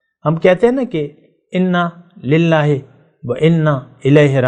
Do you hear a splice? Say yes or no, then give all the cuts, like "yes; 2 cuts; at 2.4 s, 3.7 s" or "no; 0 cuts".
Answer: no; 0 cuts